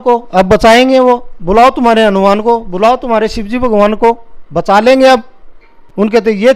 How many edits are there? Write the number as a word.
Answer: zero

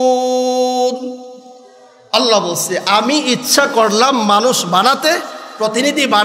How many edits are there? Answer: zero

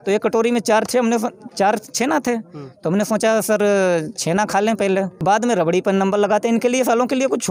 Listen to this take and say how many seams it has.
one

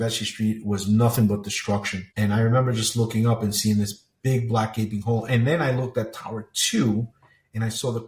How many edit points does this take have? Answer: zero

